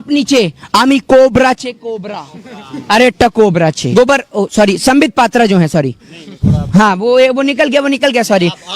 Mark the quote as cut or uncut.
cut